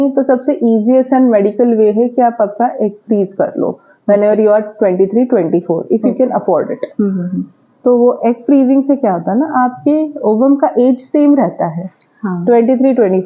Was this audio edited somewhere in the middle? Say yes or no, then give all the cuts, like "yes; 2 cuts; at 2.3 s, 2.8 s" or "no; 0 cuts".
no; 0 cuts